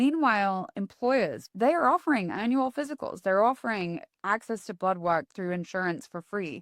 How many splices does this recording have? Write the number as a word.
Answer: one